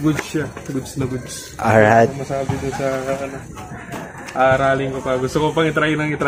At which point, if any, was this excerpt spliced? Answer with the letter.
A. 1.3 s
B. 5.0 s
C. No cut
C